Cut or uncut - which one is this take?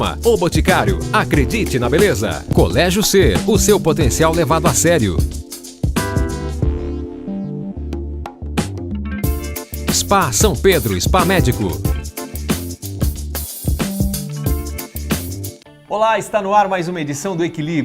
cut